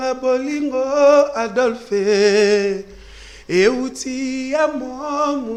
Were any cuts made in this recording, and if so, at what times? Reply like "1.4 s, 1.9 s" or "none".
none